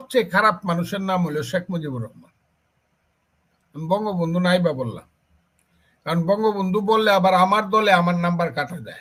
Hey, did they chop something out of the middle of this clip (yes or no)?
no